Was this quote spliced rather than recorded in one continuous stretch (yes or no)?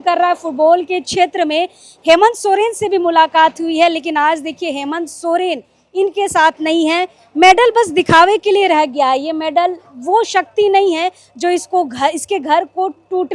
no